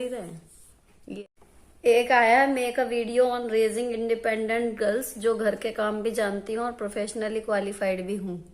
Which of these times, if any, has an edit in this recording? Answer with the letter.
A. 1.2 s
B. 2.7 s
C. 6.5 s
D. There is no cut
A